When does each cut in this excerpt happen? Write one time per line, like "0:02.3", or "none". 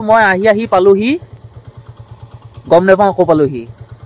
none